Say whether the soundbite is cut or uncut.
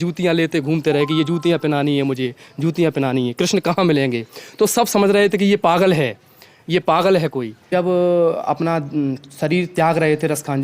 cut